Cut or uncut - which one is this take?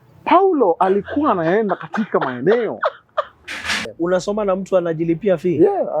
cut